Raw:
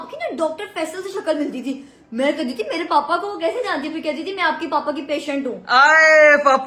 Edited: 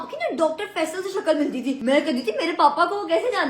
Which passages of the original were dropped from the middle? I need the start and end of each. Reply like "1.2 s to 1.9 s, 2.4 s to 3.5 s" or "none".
1.8 s to 2.1 s